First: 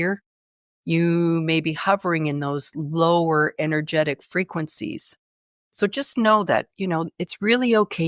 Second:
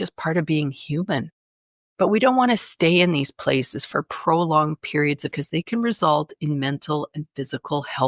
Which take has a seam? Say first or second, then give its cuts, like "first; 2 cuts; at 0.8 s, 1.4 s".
second; 1 cut; at 5.3 s